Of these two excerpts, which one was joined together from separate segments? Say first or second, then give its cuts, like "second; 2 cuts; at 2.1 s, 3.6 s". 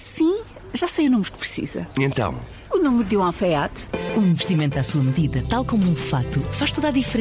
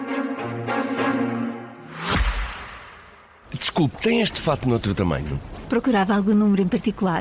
second; 1 cut; at 1.8 s